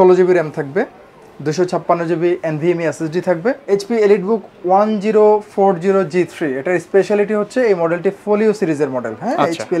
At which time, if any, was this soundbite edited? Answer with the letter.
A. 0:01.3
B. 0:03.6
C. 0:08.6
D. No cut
B